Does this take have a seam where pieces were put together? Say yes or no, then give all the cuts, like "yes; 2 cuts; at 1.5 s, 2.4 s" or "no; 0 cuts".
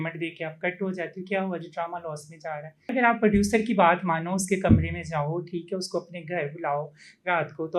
yes; 1 cut; at 2.9 s